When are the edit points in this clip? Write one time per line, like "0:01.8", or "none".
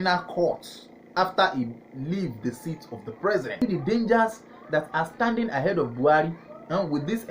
0:03.6